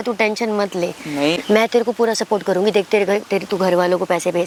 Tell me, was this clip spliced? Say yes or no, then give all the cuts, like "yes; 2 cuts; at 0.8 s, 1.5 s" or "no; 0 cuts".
no; 0 cuts